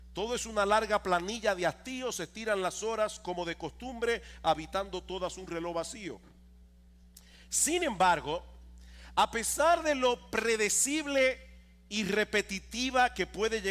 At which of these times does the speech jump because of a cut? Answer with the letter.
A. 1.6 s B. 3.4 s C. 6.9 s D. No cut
B